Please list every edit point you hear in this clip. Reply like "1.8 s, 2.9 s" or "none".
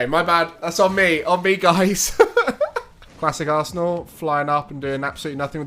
3.0 s